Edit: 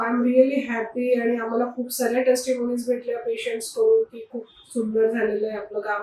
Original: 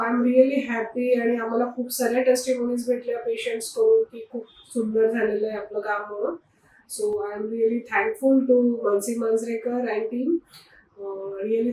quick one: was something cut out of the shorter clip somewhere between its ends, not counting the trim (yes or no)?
no